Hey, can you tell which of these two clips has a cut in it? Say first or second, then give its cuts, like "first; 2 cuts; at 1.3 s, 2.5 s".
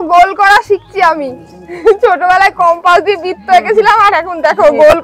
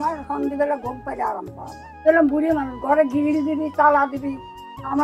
second; 1 cut; at 2.0 s